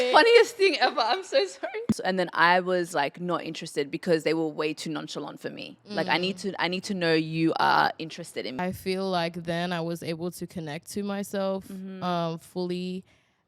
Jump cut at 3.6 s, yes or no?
no